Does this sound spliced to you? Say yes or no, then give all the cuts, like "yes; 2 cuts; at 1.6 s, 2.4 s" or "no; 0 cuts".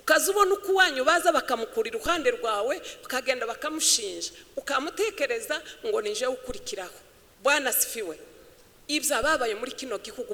no; 0 cuts